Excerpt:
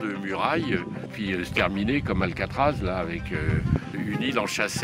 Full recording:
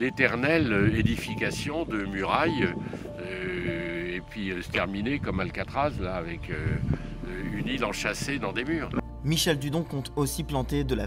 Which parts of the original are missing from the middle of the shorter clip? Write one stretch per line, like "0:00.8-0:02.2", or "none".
0:03.0-0:04.3
0:07.1-0:07.4